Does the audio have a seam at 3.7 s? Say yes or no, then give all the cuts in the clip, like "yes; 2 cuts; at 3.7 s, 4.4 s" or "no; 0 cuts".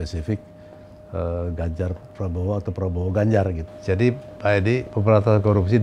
yes; 1 cut; at 3.7 s